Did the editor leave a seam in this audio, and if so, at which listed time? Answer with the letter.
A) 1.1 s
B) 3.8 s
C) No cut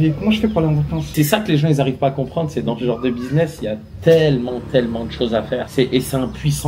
A